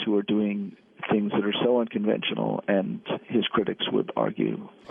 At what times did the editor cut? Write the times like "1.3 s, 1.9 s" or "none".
none